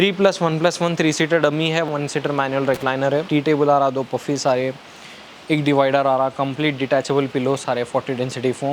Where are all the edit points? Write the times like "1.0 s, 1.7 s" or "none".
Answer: 1.9 s, 3.3 s